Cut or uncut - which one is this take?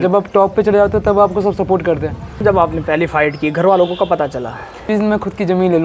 cut